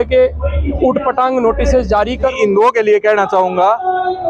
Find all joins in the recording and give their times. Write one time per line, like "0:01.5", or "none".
0:02.3